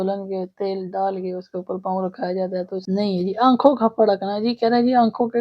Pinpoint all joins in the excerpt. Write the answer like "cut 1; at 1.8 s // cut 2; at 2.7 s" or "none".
cut 1; at 2.8 s

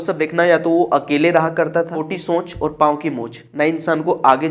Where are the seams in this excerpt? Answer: cut 1; at 2.0 s

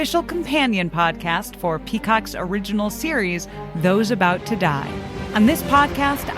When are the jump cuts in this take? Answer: cut 1; at 5.2 s

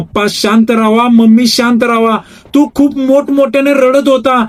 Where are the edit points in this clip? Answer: none

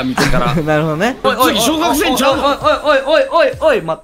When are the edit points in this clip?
cut 1; at 1.2 s

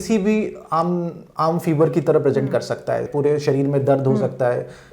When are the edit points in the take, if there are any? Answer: cut 1; at 3.1 s

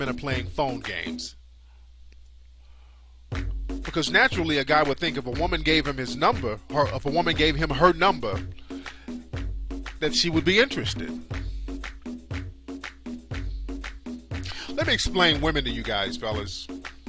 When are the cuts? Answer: none

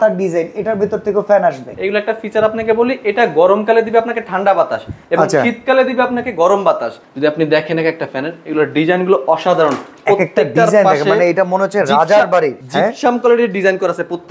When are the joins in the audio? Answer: cut 1; at 1.7 s // cut 2; at 6.9 s // cut 3; at 12.6 s

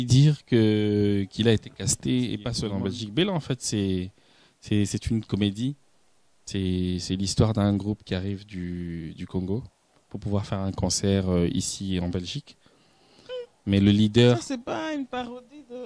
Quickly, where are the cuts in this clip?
cut 1; at 2.5 s

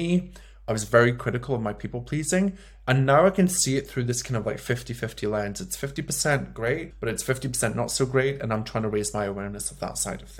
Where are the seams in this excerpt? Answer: cut 1; at 6.9 s

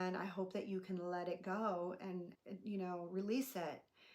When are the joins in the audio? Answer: cut 1; at 2.4 s

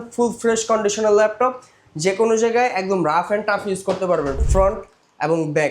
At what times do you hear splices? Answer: cut 1; at 4.4 s

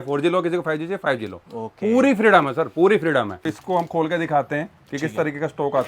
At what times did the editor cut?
cut 1; at 3.4 s

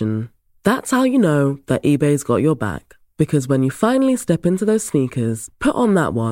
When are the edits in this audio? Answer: none

